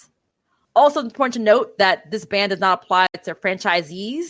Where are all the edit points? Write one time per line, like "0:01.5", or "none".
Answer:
0:03.4